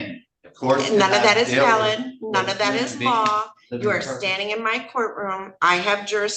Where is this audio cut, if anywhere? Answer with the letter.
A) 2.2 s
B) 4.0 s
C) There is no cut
C